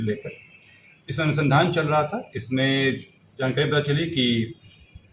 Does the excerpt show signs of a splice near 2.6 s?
no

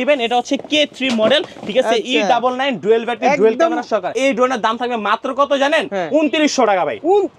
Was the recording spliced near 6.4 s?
no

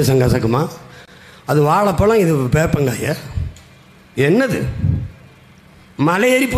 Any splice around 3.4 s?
no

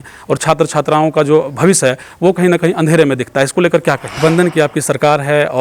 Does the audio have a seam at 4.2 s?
yes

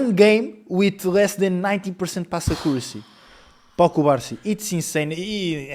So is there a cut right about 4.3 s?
no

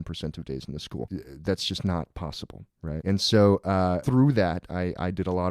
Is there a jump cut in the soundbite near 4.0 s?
yes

